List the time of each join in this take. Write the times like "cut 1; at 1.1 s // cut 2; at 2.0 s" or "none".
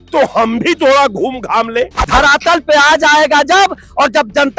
cut 1; at 2.0 s